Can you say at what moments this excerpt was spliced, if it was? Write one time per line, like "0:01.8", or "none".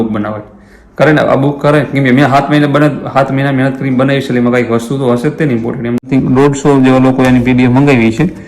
0:06.1